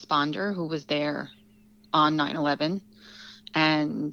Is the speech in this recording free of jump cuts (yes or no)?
yes